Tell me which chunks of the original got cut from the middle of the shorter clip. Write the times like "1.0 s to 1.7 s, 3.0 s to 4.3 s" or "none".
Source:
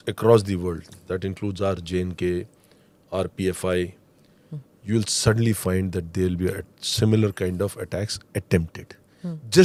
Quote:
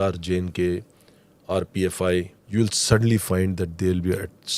4.0 s to 4.7 s

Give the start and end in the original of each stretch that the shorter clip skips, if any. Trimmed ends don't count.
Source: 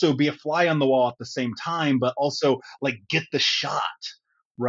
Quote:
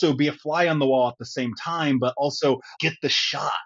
2.7 s to 3.0 s

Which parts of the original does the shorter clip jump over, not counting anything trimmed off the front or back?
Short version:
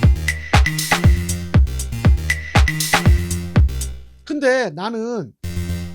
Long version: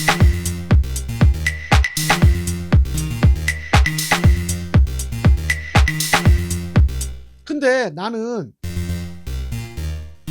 none

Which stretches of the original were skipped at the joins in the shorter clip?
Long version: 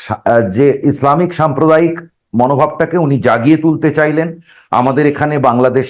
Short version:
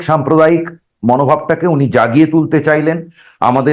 none

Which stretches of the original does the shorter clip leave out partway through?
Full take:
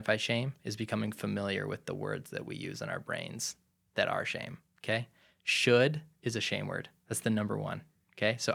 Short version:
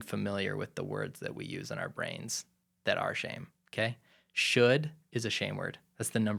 none

